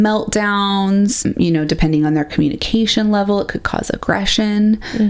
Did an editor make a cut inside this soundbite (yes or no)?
yes